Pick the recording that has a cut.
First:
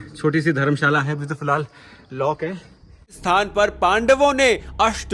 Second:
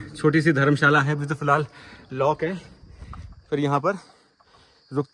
first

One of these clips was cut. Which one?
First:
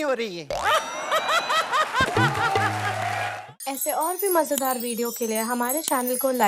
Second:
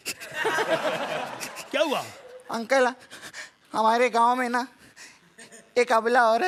first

